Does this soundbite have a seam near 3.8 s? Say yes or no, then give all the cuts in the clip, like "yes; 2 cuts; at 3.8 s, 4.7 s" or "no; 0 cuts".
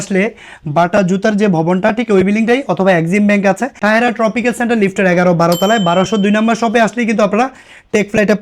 yes; 1 cut; at 3.8 s